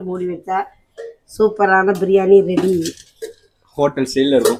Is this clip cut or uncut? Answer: uncut